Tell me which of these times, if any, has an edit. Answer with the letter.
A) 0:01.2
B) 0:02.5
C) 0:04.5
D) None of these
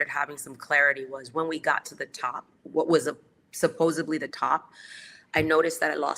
B